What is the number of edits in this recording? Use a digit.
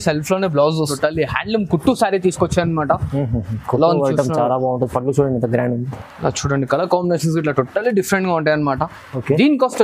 1